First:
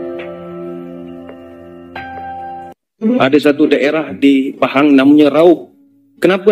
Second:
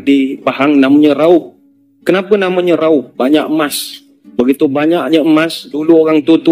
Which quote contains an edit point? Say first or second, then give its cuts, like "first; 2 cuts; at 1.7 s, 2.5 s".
first; 2 cuts; at 1.0 s, 2.8 s